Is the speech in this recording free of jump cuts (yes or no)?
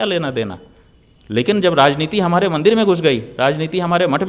yes